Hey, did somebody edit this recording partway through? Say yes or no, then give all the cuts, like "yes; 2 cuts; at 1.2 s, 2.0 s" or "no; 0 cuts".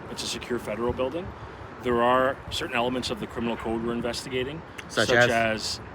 yes; 1 cut; at 1.4 s